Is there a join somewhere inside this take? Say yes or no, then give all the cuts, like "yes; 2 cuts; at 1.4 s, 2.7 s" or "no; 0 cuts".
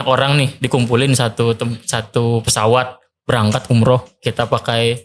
no; 0 cuts